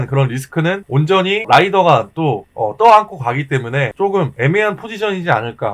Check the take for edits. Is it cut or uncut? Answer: cut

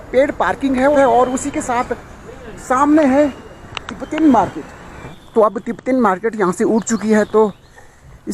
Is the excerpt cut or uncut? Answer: cut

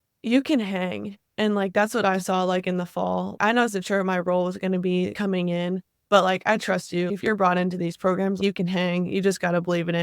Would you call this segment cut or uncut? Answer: cut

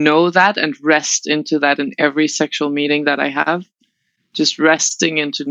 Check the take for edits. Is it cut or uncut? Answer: uncut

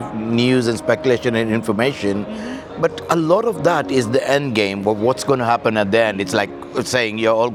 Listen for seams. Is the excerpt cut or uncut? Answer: uncut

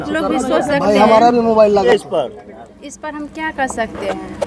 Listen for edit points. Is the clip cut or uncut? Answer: cut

